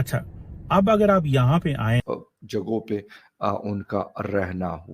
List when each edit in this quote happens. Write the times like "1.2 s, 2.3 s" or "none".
2.0 s